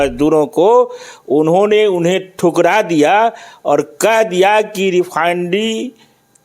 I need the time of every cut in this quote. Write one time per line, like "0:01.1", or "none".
0:01.0